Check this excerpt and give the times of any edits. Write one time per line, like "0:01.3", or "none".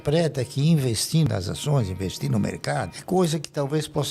0:01.3